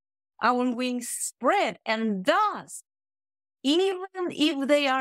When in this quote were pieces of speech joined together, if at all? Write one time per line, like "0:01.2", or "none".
none